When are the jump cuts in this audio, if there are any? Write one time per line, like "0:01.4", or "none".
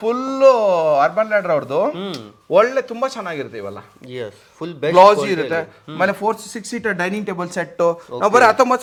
none